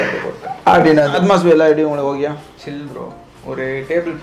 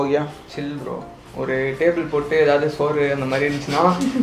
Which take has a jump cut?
first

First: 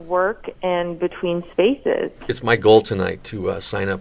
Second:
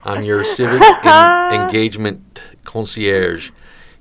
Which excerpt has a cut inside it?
first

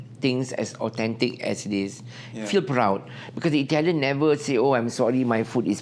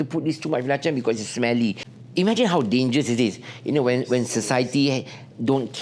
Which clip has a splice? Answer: second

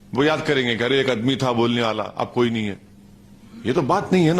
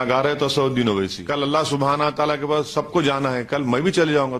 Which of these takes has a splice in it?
second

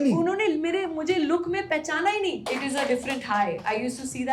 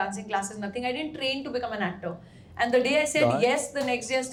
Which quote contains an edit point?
first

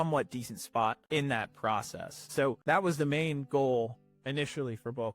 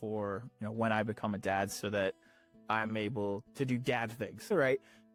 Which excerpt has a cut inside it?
first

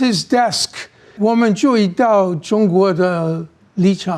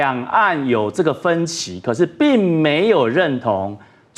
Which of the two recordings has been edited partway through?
first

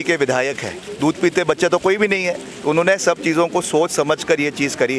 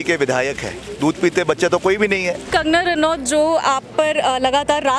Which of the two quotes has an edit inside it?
second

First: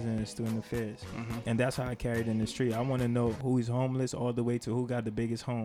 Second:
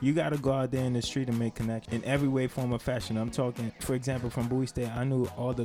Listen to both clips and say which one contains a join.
second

